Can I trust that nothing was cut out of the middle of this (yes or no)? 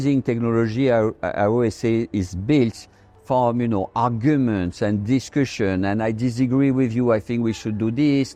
yes